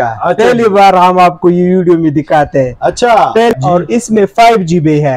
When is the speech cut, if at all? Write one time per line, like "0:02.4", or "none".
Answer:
0:03.5